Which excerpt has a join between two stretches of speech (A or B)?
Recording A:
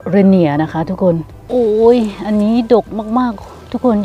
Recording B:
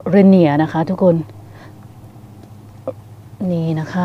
A